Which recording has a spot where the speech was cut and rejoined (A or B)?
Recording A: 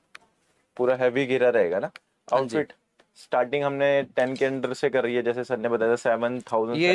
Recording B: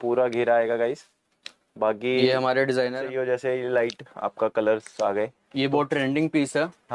B